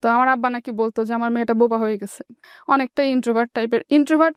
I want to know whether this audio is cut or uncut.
uncut